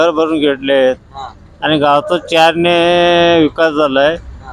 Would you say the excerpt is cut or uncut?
uncut